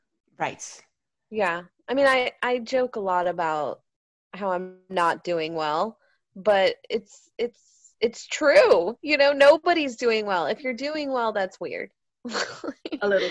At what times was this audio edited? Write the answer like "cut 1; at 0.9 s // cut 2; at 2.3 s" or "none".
cut 1; at 12.0 s